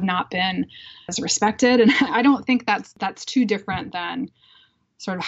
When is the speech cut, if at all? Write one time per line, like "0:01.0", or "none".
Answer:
0:01.1